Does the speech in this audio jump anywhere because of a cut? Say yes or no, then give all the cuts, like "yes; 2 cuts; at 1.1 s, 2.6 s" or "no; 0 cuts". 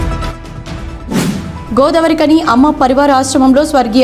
no; 0 cuts